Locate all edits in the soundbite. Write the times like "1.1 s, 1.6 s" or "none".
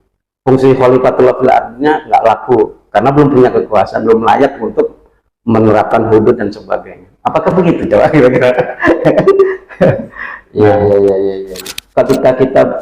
11.7 s